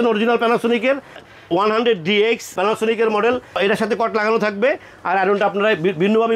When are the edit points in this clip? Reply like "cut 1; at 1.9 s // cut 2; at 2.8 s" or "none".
cut 1; at 1.2 s // cut 2; at 3.5 s